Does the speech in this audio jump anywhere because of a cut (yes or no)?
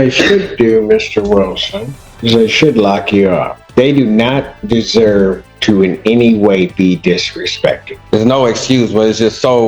yes